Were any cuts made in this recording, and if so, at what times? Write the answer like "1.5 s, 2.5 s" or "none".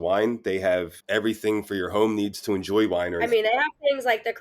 3.2 s